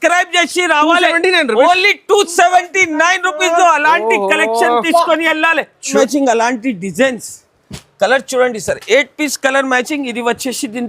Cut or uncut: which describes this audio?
cut